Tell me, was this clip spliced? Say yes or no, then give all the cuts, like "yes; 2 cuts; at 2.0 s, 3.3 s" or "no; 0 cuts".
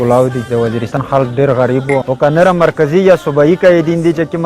yes; 2 cuts; at 1.0 s, 2.1 s